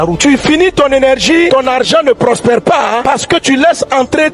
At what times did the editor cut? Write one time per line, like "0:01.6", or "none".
0:01.5